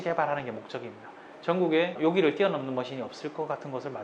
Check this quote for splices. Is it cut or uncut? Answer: uncut